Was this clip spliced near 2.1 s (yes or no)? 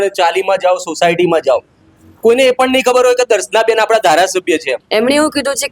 no